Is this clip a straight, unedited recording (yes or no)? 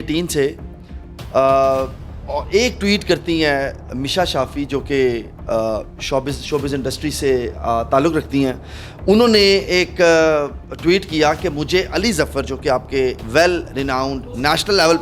yes